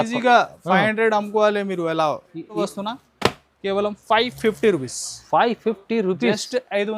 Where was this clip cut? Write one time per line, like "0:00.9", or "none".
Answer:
0:02.6